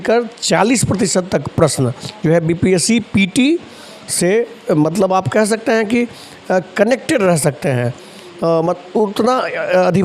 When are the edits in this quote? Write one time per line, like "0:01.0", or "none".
none

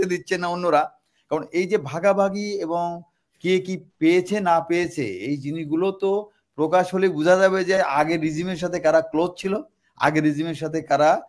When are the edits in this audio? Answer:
none

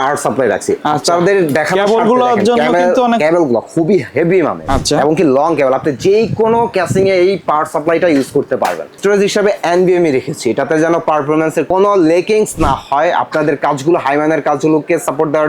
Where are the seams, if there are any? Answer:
0:04.6
0:09.0
0:11.7

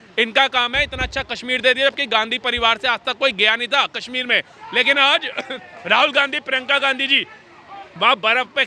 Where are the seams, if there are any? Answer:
none

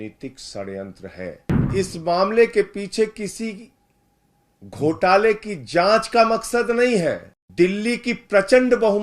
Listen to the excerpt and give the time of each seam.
0:01.7
0:07.3

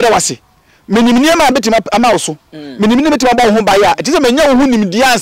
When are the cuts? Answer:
none

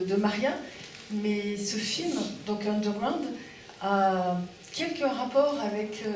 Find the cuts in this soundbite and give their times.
none

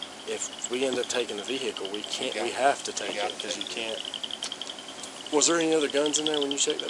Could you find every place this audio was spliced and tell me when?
none

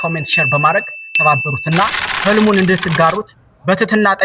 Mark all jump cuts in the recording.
none

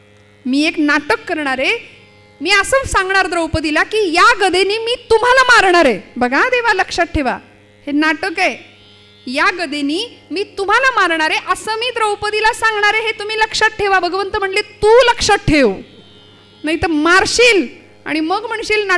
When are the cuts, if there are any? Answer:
none

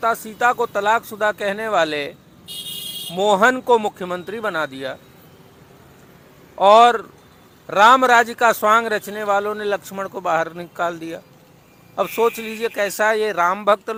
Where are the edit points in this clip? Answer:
none

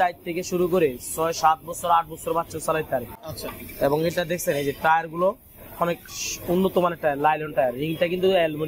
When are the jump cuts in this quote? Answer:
none

